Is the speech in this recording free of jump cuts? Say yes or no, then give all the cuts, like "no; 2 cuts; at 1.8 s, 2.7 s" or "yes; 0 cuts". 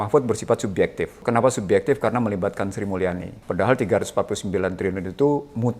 no; 2 cuts; at 1.2 s, 3.3 s